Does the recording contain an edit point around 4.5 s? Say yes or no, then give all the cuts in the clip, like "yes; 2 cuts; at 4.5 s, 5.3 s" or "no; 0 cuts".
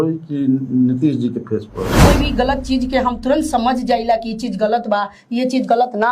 no; 1 cut; at 2.1 s